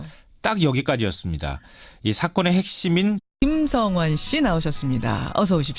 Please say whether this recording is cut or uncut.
uncut